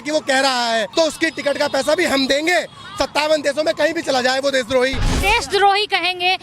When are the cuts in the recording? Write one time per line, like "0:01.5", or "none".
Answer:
0:00.9
0:05.2